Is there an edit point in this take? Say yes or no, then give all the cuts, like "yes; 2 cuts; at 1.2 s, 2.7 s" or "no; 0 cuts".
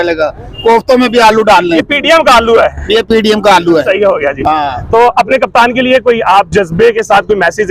no; 0 cuts